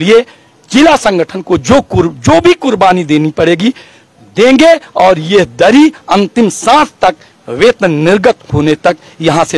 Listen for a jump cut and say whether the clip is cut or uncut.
uncut